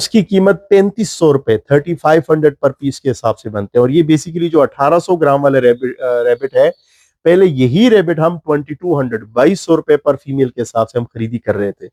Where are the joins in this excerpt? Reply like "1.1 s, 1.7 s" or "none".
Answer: none